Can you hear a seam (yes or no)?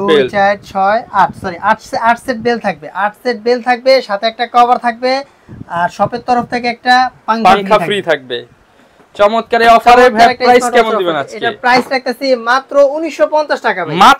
no